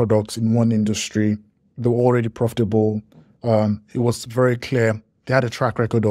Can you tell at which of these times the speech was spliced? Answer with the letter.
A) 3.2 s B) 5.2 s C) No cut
C